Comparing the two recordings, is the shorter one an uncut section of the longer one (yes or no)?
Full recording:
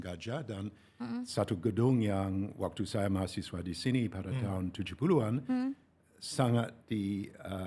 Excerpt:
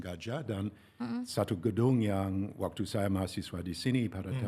yes